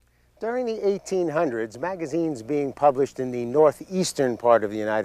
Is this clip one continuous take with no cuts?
no; 1 cut; at 4.1 s

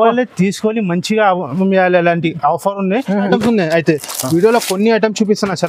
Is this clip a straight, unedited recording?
no; 1 cut; at 3.2 s

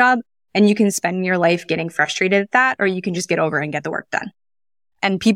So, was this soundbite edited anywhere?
no; 0 cuts

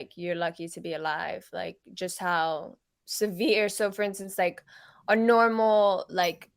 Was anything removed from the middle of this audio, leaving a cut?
no; 0 cuts

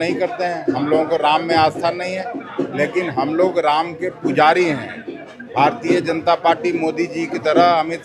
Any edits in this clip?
no; 0 cuts

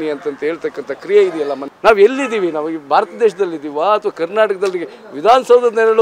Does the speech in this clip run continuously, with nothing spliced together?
no; 1 cut; at 1.6 s

